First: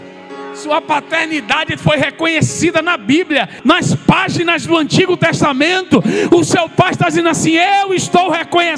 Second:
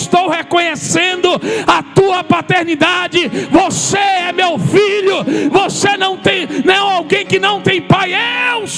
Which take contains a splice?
first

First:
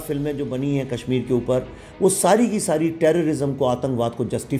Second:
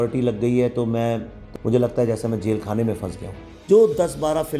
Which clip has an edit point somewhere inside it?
second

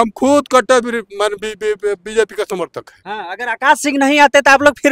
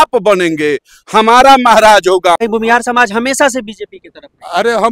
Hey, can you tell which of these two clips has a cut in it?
second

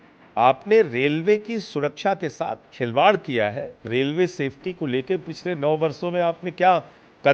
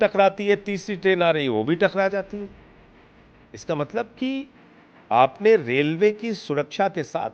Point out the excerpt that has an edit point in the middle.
first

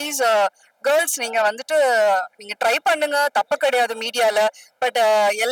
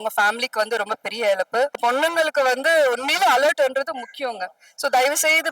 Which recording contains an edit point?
second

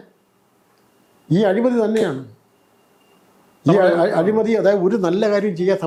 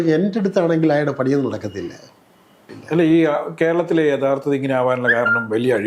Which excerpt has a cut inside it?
second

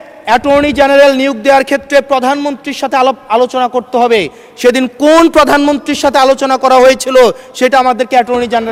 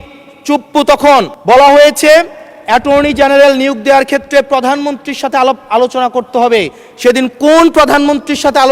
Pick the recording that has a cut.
second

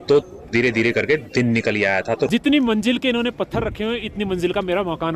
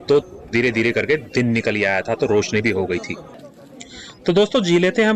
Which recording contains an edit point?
first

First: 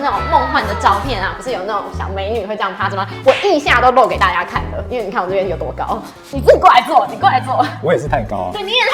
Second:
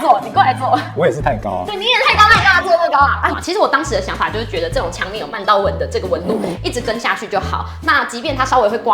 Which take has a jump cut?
second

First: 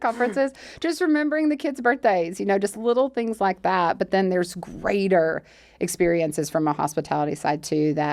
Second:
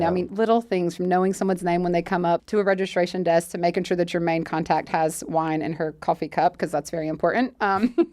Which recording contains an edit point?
second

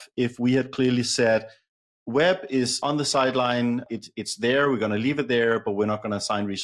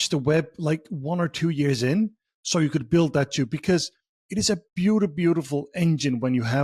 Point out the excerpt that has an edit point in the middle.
first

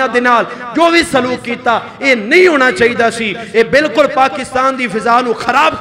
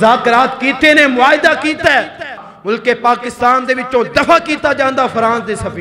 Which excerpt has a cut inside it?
second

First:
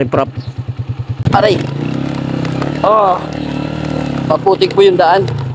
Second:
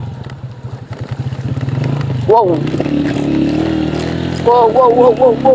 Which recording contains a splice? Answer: first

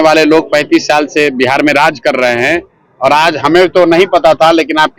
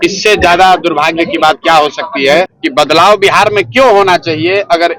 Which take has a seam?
second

